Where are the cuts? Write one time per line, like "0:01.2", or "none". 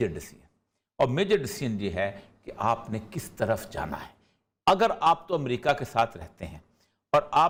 none